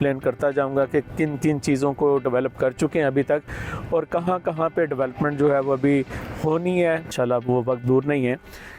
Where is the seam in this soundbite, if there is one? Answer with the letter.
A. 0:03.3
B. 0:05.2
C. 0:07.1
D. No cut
C